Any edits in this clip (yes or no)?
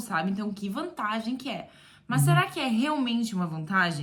no